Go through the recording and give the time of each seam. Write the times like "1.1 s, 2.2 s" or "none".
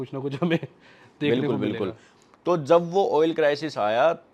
2.1 s